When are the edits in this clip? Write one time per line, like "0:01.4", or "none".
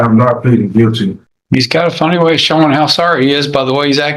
0:01.1